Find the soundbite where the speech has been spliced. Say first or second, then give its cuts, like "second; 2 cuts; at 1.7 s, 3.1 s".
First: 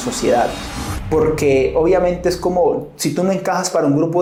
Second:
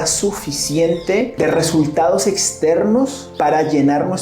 second; 2 cuts; at 1.3 s, 3.2 s